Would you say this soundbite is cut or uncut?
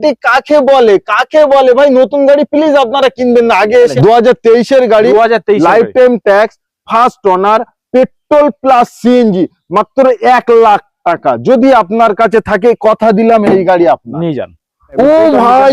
cut